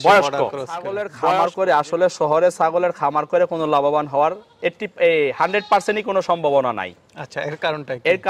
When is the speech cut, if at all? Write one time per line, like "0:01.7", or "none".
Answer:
0:01.0